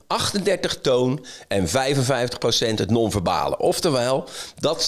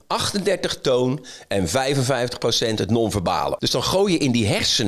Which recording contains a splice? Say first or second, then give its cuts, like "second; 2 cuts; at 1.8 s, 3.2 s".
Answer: second; 1 cut; at 3.6 s